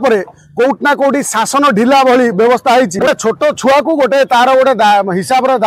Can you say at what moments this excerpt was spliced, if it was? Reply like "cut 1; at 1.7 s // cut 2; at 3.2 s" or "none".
cut 1; at 3.1 s